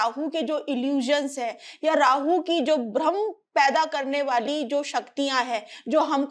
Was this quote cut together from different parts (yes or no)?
no